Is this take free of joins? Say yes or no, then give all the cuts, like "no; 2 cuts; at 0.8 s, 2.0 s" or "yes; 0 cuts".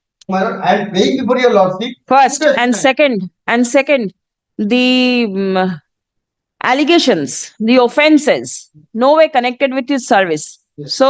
yes; 0 cuts